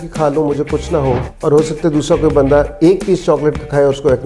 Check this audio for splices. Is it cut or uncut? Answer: cut